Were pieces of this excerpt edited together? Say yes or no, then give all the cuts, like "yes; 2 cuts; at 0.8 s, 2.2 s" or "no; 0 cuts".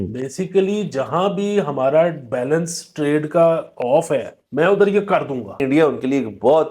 yes; 2 cuts; at 4.4 s, 5.6 s